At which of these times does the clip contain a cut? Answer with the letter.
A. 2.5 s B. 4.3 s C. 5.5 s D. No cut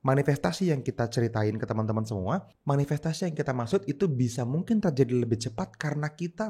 A